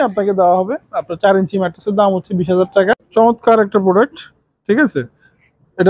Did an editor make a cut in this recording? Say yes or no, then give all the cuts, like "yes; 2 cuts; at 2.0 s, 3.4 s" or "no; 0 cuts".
yes; 1 cut; at 2.9 s